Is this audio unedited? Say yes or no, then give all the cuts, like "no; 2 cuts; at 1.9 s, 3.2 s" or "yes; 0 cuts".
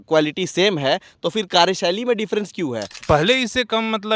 no; 1 cut; at 2.9 s